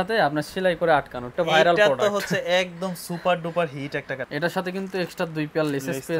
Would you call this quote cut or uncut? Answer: cut